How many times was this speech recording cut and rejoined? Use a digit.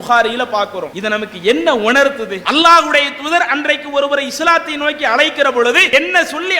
3